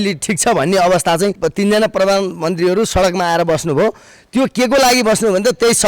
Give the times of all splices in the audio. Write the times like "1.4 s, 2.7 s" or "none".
1.4 s